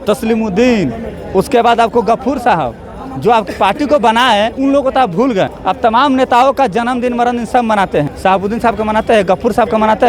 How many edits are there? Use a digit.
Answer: 3